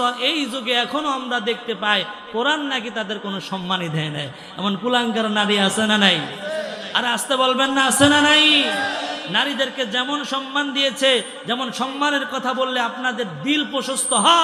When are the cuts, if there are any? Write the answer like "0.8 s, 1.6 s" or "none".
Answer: none